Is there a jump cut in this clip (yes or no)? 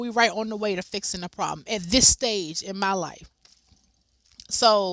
no